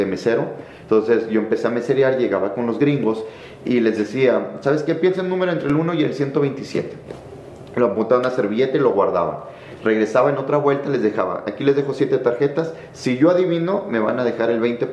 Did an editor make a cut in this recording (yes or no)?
no